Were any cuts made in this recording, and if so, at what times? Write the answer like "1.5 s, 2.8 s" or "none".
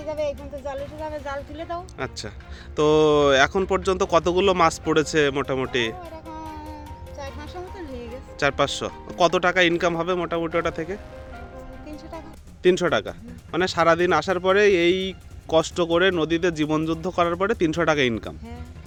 none